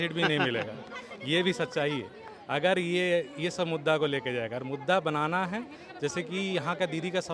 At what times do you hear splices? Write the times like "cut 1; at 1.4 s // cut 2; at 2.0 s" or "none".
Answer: none